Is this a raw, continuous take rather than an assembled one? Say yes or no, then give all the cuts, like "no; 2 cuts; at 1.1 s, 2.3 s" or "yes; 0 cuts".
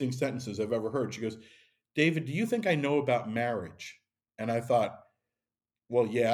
yes; 0 cuts